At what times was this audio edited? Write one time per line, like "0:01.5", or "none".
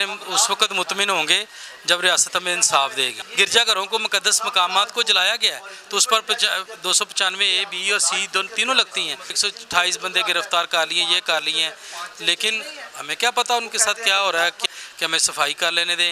0:03.1
0:09.4
0:14.7